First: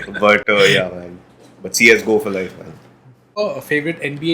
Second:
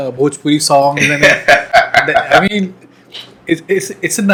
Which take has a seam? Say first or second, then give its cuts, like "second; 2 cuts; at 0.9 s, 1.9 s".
first; 1 cut; at 3.4 s